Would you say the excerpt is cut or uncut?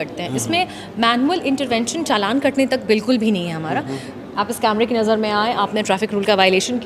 cut